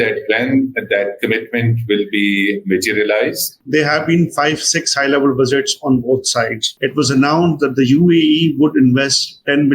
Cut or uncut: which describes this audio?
cut